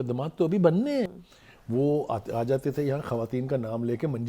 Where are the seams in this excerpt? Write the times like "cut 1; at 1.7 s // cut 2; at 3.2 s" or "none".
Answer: cut 1; at 1.2 s